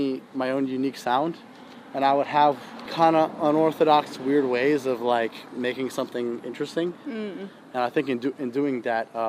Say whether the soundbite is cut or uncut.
uncut